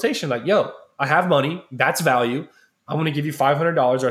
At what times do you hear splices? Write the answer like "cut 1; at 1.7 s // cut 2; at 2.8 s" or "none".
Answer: none